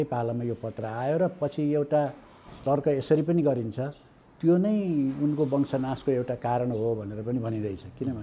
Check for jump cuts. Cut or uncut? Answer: uncut